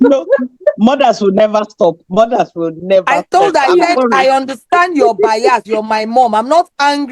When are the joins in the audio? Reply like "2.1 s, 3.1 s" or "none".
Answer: none